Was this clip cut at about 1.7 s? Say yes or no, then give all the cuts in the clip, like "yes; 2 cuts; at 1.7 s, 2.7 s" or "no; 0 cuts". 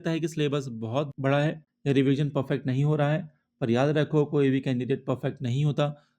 yes; 1 cut; at 1.7 s